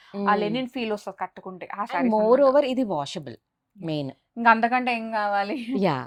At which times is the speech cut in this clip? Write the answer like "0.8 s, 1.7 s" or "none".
none